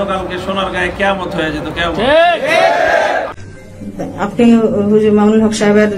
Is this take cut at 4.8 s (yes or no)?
no